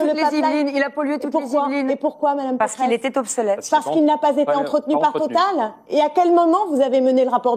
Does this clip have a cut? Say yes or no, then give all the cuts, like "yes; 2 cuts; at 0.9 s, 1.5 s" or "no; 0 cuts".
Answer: no; 0 cuts